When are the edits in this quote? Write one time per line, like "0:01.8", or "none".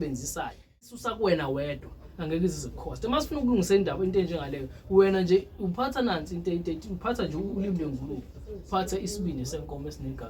0:01.0